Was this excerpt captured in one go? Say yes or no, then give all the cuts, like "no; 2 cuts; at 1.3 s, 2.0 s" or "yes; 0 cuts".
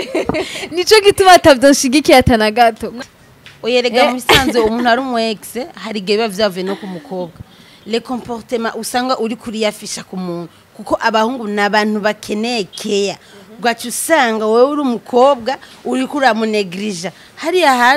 no; 1 cut; at 2.9 s